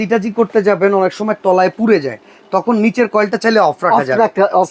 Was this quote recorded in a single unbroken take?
yes; 0 cuts

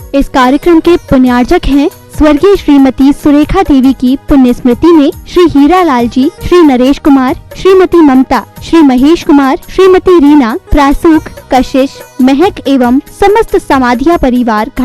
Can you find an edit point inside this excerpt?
no; 0 cuts

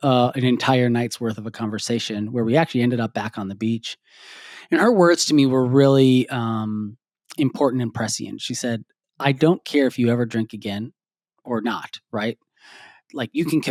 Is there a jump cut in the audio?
no; 0 cuts

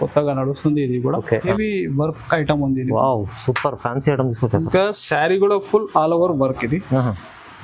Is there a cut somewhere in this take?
yes; 1 cut; at 1.5 s

